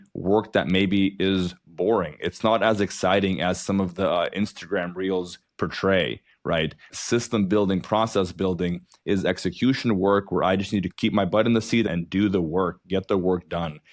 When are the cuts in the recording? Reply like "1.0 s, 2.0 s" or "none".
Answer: 11.9 s